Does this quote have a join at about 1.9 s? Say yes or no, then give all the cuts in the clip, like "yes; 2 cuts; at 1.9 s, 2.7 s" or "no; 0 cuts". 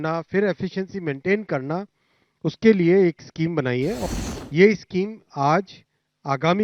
no; 1 cut; at 4.0 s